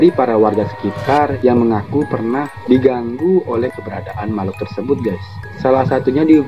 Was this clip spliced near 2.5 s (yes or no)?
yes